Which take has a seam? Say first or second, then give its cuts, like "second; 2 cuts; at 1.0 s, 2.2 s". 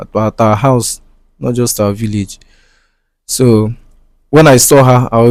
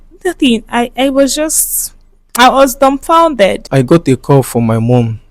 second; 1 cut; at 3.6 s